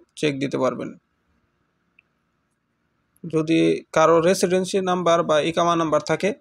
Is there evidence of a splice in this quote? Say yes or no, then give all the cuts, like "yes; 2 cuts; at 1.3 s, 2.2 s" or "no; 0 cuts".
no; 0 cuts